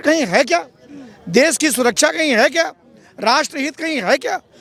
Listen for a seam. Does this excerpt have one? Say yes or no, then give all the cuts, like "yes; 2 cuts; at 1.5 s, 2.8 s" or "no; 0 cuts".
no; 0 cuts